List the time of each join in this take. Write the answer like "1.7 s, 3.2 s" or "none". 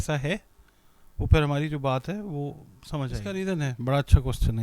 3.2 s